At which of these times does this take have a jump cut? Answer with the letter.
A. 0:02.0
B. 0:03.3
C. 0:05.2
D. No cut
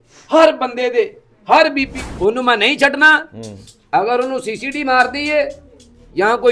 A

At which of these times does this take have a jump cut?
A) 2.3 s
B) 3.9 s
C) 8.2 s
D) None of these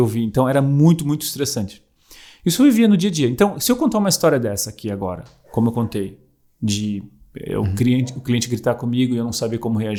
D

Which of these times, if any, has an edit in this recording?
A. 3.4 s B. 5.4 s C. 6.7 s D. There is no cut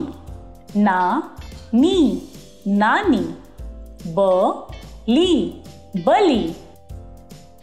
C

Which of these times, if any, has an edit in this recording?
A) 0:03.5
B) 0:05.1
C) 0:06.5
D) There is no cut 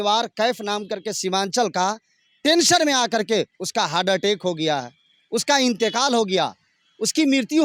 D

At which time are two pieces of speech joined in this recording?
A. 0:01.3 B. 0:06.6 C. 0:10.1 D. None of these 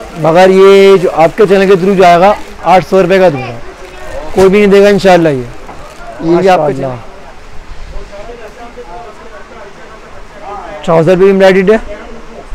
B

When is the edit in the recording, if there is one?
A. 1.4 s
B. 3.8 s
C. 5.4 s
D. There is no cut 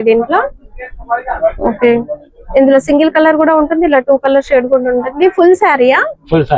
D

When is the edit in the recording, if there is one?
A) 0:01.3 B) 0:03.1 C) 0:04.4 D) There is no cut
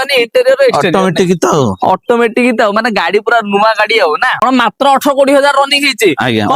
C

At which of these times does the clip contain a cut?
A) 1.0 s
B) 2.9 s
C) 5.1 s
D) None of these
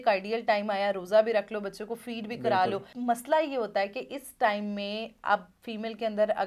B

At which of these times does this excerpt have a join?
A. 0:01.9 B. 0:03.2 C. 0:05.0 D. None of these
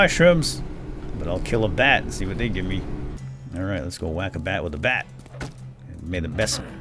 B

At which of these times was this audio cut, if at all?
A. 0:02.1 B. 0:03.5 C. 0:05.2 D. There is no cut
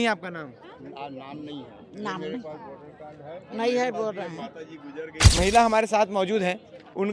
C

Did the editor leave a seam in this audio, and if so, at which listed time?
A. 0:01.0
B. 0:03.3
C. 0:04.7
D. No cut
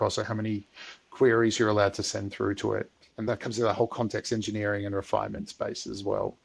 B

